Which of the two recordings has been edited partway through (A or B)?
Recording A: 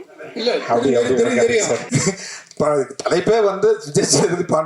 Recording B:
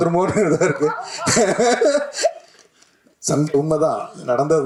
A